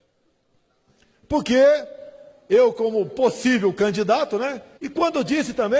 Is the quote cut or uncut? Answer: uncut